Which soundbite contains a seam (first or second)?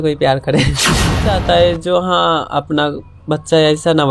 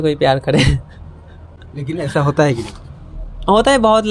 first